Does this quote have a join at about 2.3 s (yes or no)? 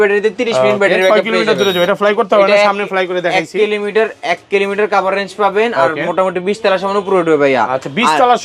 no